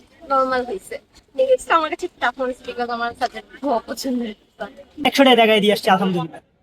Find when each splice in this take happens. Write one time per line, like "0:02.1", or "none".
0:04.9